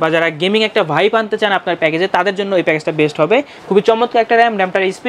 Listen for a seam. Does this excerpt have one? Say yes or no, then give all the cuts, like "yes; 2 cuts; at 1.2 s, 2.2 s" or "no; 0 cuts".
yes; 1 cut; at 3.6 s